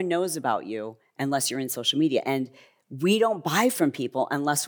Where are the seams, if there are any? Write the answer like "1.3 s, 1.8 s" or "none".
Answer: none